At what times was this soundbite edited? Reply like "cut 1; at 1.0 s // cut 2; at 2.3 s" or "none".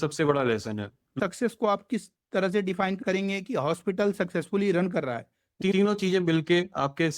cut 1; at 1.1 s // cut 2; at 3.0 s // cut 3; at 5.6 s